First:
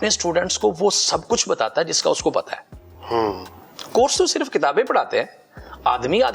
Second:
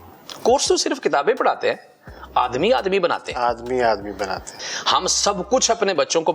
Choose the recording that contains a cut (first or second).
second